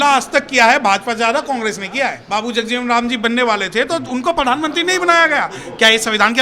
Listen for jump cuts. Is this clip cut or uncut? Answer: cut